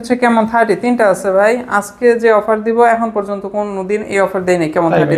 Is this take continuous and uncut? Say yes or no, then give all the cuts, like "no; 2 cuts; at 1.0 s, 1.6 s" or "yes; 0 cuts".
yes; 0 cuts